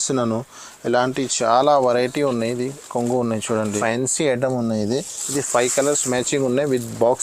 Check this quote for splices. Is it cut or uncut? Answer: cut